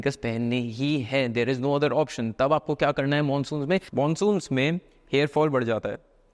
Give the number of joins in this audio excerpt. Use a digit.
1